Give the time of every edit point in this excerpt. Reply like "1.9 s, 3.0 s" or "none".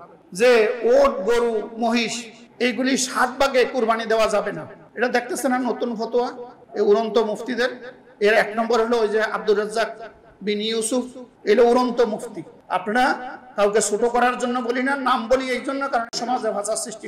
16.1 s

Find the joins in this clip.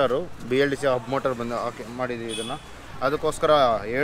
2.8 s

